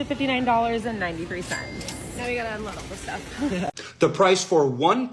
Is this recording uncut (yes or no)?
yes